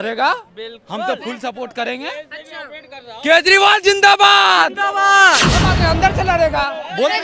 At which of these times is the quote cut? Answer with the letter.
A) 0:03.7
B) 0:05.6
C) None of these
B